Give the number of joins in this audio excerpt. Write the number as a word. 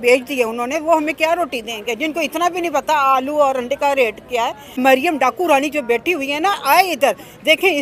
one